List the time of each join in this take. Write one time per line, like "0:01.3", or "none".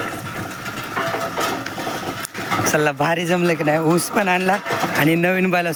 none